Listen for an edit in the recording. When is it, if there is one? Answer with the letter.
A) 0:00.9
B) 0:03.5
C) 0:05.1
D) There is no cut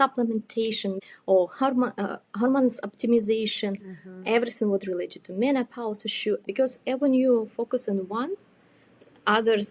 A